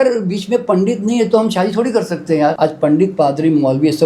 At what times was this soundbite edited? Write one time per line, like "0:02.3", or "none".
0:02.5